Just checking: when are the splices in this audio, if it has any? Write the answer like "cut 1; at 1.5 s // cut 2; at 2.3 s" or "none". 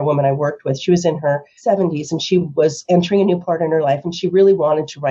cut 1; at 1.5 s